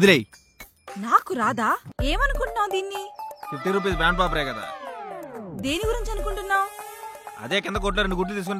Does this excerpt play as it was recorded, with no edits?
no; 1 cut; at 1.9 s

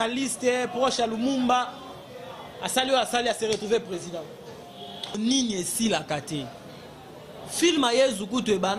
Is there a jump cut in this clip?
yes; 1 cut; at 5.2 s

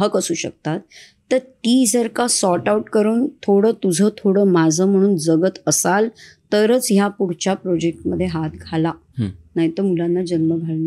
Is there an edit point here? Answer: no; 0 cuts

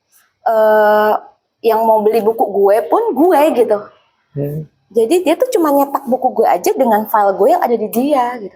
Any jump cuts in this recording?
no; 0 cuts

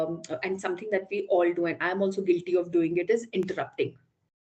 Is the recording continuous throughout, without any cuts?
yes; 0 cuts

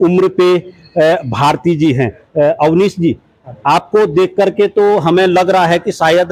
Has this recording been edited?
no; 0 cuts

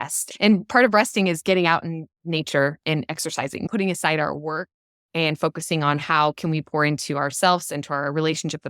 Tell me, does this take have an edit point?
yes; 1 cut; at 3.6 s

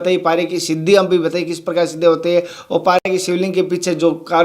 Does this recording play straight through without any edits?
yes; 0 cuts

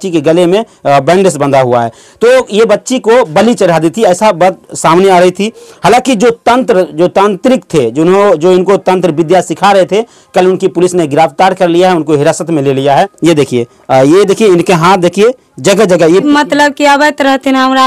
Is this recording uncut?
no; 2 cuts; at 13.1 s, 16.2 s

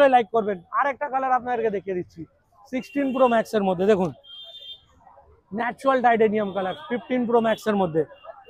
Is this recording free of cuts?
yes; 0 cuts

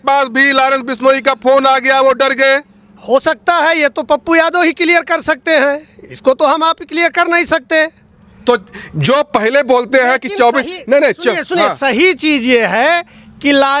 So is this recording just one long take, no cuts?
yes; 0 cuts

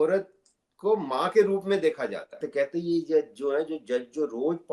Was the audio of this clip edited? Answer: yes; 1 cut; at 2.4 s

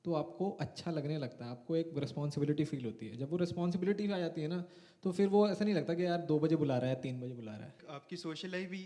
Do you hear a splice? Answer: yes; 1 cut; at 7.8 s

